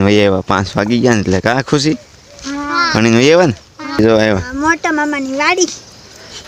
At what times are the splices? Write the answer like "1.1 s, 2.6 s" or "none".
4.0 s